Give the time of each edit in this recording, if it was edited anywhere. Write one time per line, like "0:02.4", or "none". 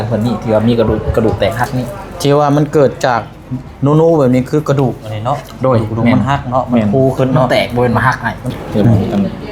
0:08.5